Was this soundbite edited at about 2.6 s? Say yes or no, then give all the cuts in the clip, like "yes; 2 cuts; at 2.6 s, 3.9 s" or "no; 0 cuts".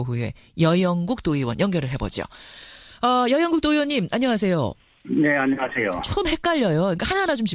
no; 1 cut; at 1.0 s